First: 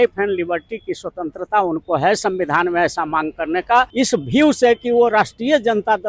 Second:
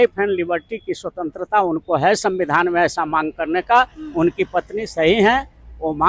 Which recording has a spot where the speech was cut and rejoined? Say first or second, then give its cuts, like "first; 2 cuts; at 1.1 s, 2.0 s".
first; 1 cut; at 3.9 s